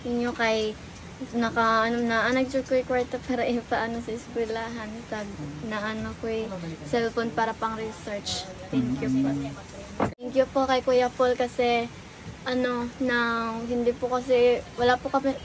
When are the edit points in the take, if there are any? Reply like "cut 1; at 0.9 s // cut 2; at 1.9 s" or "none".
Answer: cut 1; at 10.1 s